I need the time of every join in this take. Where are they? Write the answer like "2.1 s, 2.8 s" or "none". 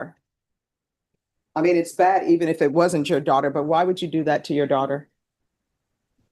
none